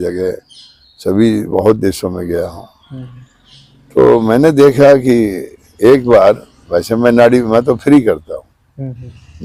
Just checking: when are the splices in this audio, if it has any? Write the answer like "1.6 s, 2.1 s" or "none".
none